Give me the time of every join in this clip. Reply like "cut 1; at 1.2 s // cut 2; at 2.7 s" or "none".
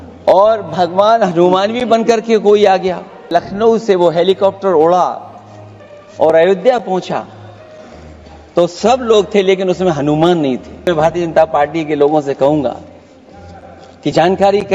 cut 1; at 3.3 s // cut 2; at 10.9 s

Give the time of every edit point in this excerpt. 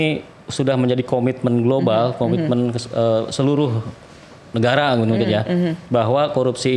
none

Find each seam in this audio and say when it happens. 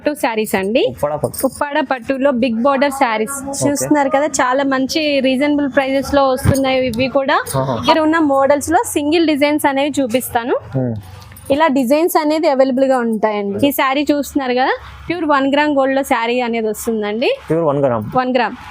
cut 1; at 7.8 s // cut 2; at 13.6 s

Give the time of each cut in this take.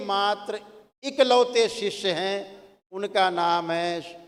none

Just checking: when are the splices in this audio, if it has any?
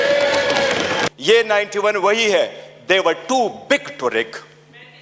cut 1; at 1.1 s

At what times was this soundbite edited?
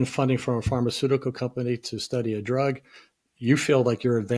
none

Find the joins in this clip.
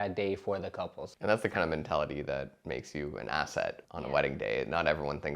cut 1; at 1.0 s // cut 2; at 2.6 s // cut 3; at 3.8 s

